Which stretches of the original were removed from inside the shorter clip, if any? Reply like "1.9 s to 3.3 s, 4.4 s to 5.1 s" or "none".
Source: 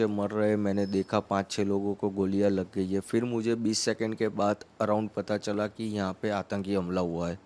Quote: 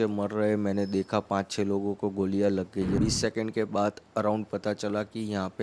3.0 s to 3.6 s